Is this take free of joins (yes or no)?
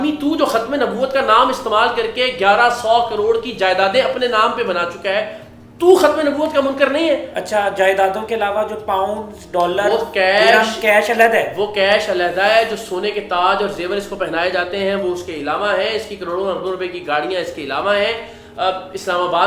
yes